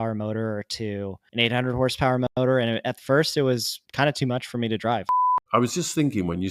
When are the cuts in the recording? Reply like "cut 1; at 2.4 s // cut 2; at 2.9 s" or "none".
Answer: cut 1; at 1.2 s // cut 2; at 3.8 s // cut 3; at 5.4 s